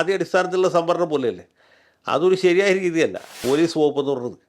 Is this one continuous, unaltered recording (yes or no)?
no